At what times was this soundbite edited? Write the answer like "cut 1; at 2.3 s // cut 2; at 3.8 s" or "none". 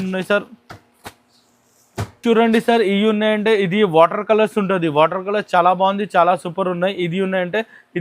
cut 1; at 2.0 s